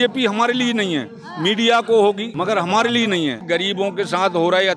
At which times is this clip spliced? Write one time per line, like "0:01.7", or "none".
0:02.3
0:03.4

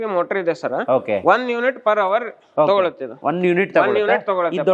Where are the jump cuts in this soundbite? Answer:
0:03.2

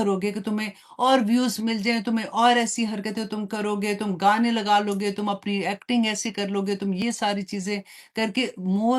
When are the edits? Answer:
none

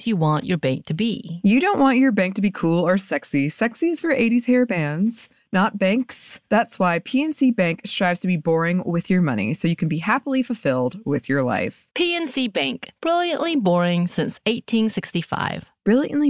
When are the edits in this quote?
none

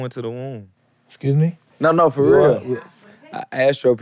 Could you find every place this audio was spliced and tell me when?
0:01.6

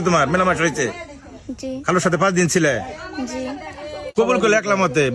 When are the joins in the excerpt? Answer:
0:04.1

